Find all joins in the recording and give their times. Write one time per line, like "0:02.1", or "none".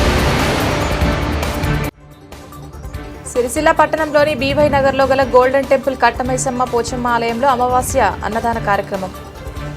none